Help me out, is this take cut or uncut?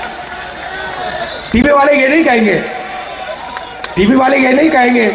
uncut